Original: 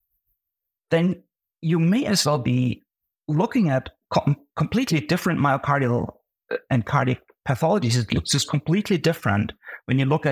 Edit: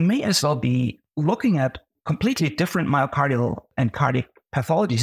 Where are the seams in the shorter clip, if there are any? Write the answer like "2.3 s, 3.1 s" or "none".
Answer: 1.0 s, 1.9 s, 3.7 s